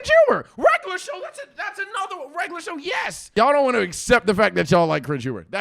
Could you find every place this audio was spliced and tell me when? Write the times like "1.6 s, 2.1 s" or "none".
3.3 s